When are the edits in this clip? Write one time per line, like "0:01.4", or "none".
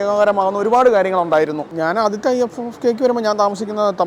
0:01.6